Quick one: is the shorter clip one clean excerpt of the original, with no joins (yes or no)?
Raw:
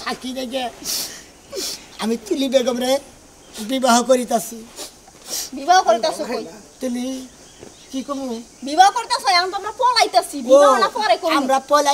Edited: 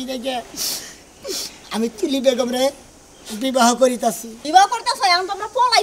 no